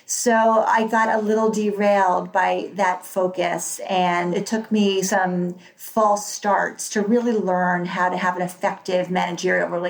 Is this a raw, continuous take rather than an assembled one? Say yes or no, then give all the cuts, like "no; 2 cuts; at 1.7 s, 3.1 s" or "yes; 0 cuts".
no; 1 cut; at 4.3 s